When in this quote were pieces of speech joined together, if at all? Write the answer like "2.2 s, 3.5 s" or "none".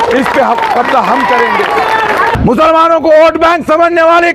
2.3 s